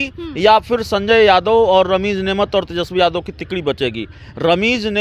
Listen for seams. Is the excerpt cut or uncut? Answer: uncut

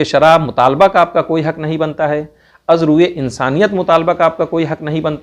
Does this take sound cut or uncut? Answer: uncut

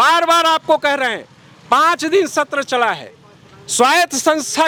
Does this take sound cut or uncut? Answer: uncut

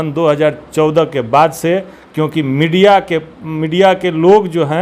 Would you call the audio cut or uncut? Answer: uncut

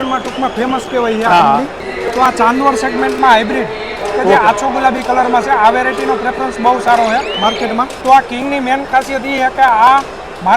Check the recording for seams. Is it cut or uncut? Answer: cut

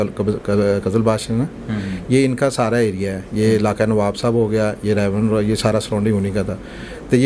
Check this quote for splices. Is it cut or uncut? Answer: uncut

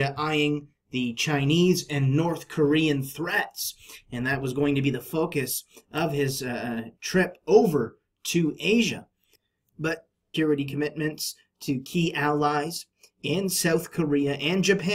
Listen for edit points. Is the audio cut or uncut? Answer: uncut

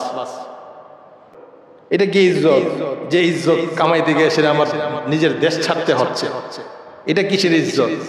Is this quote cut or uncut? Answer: cut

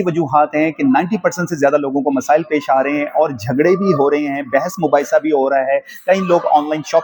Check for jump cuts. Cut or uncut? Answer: uncut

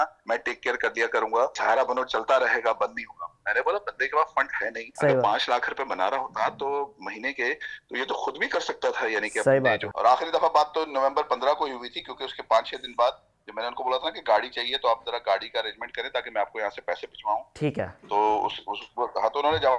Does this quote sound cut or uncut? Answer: cut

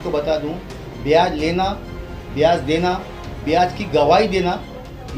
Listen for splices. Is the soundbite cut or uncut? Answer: uncut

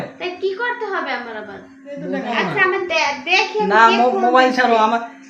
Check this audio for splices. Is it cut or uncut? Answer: cut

